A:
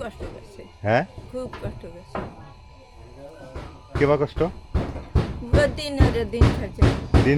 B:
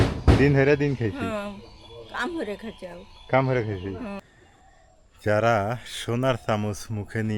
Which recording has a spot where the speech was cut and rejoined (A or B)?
B